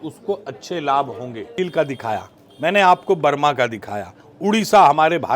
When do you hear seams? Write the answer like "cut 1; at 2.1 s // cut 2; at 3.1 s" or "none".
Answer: cut 1; at 1.5 s